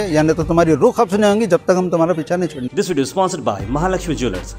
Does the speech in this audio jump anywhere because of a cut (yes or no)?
yes